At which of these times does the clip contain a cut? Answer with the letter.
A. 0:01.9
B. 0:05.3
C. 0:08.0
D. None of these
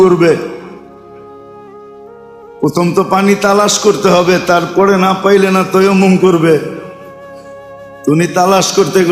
D